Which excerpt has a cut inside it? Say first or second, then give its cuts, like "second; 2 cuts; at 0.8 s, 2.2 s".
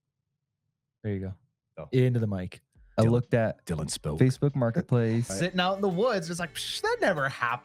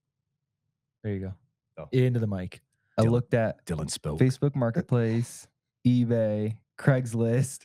first; 1 cut; at 5.3 s